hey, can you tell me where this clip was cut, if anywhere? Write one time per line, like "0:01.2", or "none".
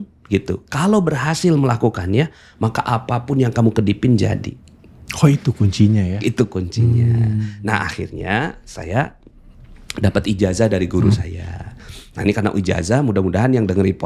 none